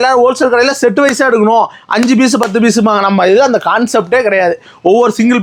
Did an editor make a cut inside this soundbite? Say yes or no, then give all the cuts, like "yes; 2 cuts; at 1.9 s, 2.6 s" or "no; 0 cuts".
no; 0 cuts